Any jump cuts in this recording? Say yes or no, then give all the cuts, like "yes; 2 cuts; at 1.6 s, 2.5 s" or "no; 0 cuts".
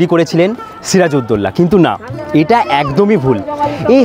no; 0 cuts